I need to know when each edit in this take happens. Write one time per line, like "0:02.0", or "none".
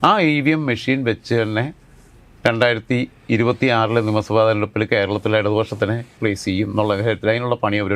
0:06.1